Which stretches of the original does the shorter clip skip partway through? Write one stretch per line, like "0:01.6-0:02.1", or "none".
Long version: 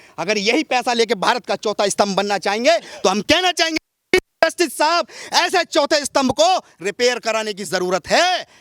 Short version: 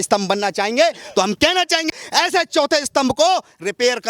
0:03.9-0:05.2